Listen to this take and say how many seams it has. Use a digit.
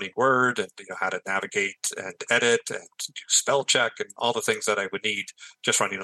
0